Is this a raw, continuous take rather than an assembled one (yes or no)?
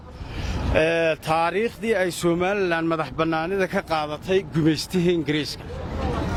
yes